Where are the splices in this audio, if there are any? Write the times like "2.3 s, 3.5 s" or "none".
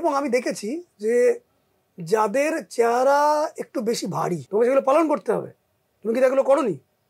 4.4 s